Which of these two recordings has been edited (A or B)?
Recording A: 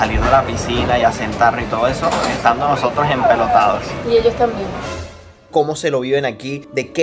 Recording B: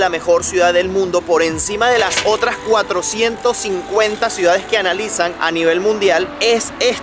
A